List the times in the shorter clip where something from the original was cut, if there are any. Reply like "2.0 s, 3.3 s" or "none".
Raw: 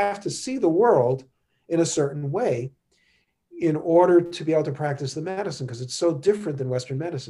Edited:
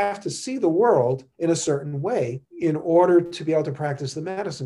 1.3 s, 2.4 s

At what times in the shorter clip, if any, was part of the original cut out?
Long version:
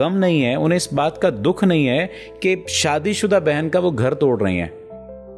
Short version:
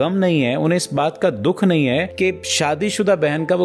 2.1 s

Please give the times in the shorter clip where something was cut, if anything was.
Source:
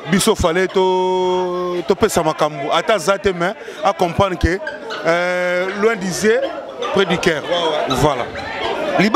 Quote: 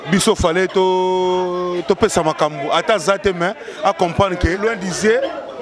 4.6 s

